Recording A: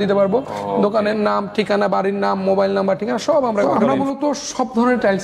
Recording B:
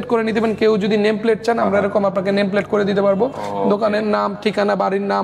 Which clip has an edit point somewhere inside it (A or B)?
A